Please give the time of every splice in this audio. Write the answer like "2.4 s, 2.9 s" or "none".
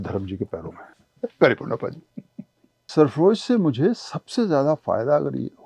0.9 s, 2.9 s